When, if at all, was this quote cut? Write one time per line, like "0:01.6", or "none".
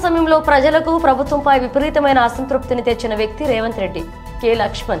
none